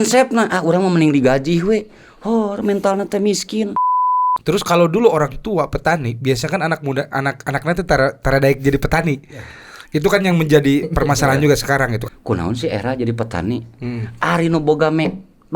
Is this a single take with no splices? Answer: no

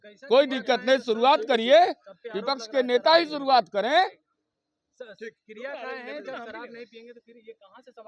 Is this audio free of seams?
yes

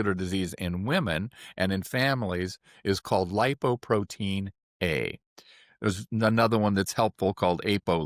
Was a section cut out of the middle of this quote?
no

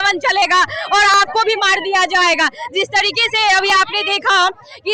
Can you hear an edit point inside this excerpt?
no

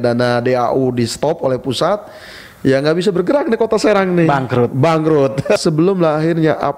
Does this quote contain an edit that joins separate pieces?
yes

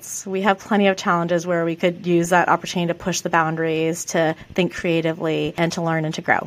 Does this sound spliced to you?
yes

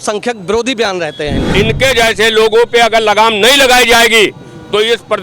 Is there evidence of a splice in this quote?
yes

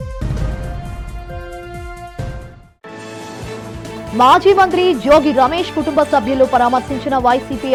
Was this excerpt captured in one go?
yes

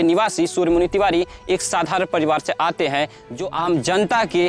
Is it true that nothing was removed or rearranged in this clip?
no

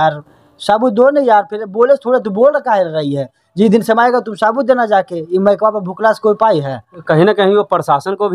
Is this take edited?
no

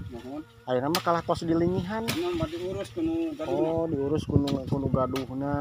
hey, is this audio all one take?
yes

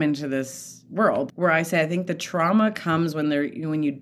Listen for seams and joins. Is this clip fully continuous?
no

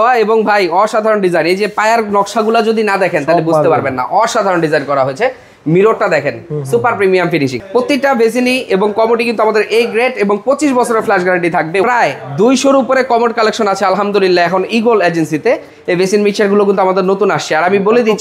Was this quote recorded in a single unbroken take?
no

